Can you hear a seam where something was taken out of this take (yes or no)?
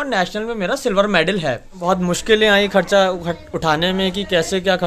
yes